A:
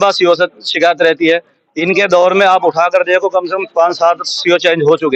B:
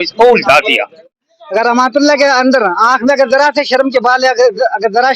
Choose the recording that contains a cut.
B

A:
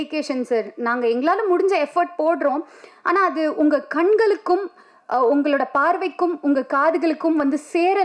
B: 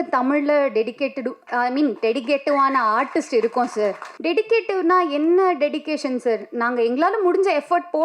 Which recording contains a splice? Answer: B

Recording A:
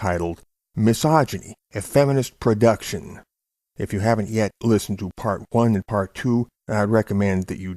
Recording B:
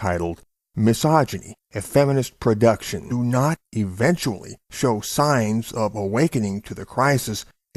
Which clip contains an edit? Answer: A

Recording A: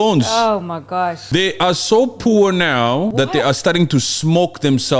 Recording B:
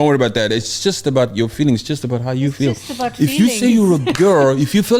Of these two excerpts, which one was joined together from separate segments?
A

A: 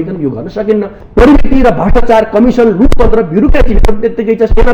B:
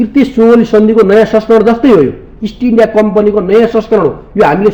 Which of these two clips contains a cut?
A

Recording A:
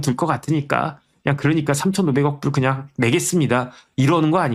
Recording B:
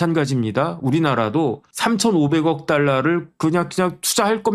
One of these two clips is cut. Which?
B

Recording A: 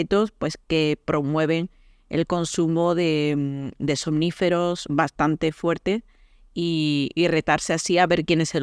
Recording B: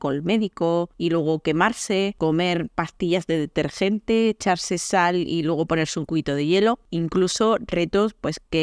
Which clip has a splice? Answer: B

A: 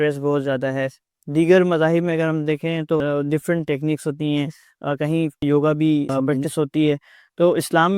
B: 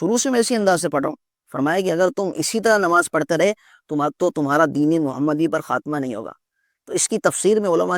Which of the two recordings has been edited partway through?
A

